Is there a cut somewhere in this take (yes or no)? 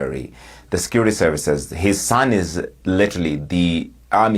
no